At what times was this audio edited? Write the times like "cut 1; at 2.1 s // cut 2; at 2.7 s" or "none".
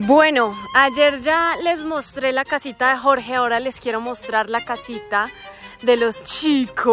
none